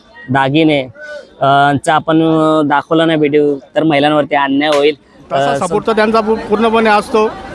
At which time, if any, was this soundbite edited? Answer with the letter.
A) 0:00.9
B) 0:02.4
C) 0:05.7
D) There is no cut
C